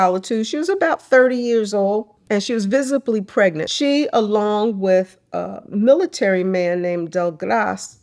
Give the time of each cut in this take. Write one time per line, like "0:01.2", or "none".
0:02.1
0:03.7

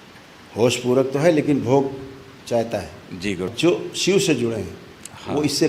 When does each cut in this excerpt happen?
0:03.5

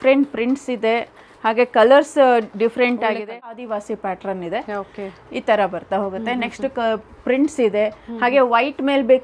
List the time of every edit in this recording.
0:03.6

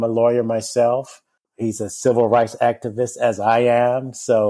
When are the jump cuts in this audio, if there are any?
0:01.5

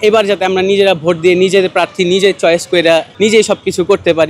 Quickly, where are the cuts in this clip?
0:03.1

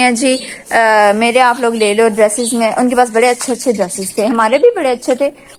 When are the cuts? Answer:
none

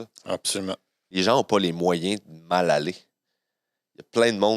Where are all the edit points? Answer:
0:01.0

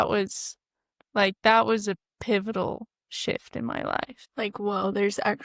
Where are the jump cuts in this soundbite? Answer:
0:04.2

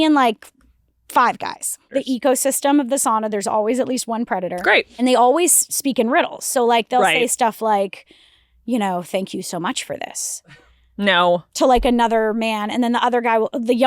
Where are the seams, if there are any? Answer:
0:01.8
0:04.9

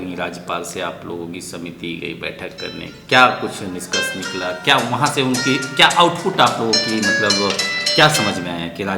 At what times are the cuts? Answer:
none

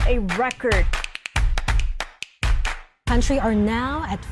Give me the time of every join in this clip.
none

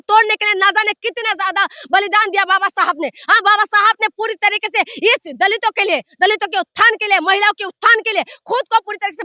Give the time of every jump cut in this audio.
none

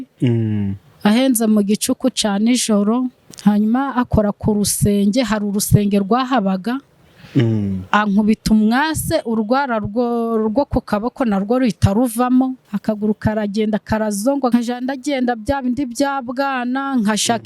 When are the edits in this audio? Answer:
0:03.2
0:12.7
0:14.5

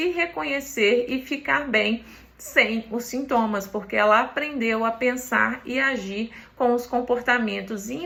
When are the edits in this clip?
none

